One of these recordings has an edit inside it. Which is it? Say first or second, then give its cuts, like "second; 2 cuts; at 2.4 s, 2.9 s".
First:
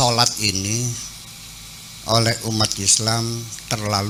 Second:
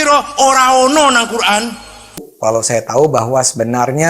second; 1 cut; at 2.3 s